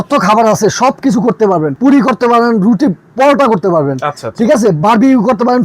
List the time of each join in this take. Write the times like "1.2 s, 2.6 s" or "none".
1.7 s